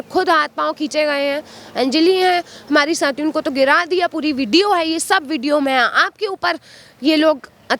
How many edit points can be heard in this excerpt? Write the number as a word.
zero